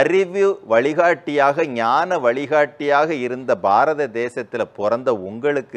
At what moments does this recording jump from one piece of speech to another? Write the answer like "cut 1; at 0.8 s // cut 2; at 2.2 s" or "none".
none